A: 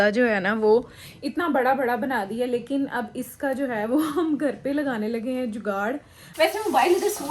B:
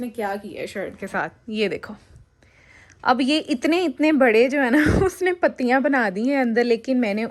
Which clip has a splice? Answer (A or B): A